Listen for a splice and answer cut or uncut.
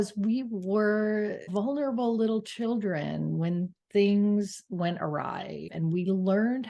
cut